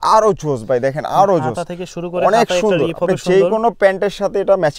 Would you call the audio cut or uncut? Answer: uncut